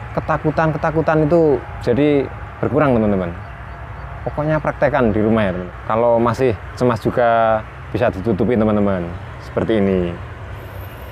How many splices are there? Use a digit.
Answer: 1